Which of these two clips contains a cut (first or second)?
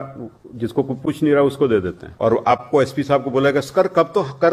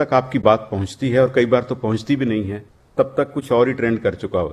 first